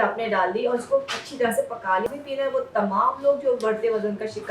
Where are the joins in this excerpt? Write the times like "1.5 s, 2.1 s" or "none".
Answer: 2.1 s